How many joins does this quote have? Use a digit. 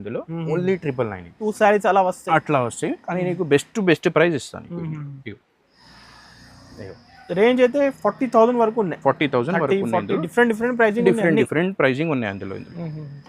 1